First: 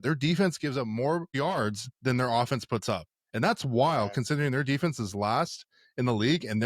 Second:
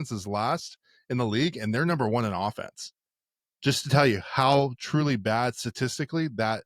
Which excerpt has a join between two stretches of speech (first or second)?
first